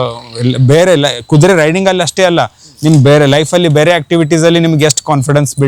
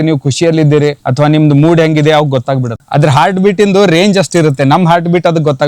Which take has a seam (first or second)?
second